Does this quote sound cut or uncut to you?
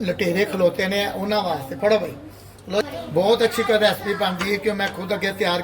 cut